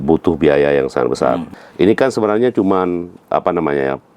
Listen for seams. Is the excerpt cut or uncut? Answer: cut